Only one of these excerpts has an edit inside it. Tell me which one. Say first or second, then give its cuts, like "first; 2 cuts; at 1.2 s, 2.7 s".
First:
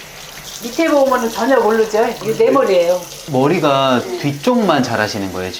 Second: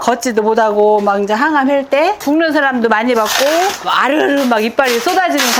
second; 1 cut; at 2.2 s